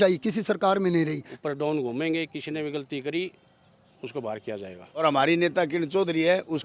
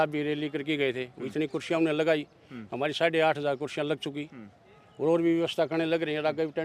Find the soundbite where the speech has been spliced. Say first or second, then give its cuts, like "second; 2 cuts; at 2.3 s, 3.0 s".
first; 2 cuts; at 1.3 s, 5.0 s